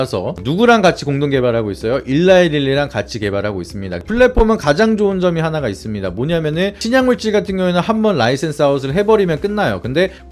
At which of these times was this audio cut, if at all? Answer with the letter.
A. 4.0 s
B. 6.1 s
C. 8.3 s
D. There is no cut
A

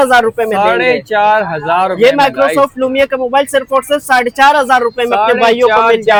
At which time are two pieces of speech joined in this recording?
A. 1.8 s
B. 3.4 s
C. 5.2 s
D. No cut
D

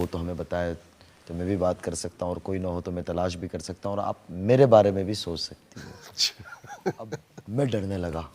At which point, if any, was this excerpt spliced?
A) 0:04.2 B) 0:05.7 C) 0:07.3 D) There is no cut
C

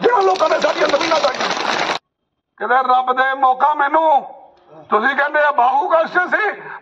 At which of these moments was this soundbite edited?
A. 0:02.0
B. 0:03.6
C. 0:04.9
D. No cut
A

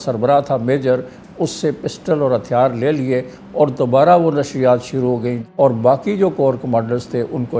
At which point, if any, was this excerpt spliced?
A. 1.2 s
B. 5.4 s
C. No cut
B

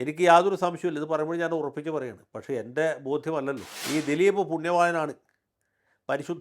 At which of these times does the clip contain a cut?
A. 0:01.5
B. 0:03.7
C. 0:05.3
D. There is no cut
B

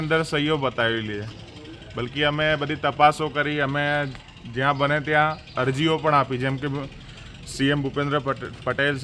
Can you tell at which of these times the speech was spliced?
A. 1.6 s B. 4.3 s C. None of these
C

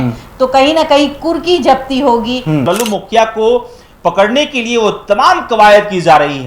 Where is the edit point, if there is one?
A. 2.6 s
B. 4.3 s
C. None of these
A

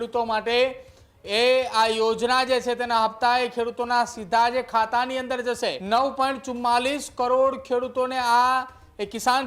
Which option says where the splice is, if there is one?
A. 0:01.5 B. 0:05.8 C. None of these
B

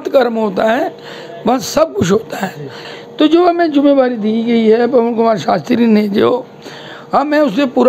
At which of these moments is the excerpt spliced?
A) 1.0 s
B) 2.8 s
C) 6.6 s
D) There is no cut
B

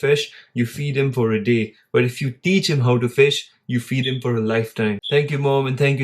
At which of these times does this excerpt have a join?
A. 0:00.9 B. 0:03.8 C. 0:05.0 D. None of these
C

